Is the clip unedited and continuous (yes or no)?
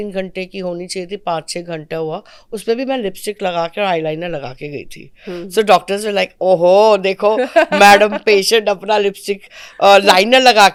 yes